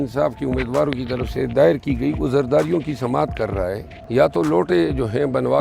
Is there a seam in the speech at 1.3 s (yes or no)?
no